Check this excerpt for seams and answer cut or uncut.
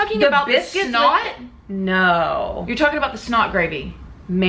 uncut